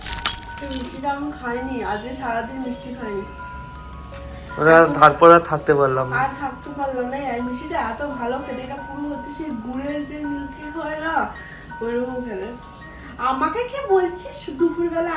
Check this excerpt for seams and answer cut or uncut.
uncut